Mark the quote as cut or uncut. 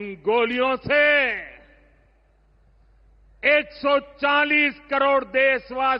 uncut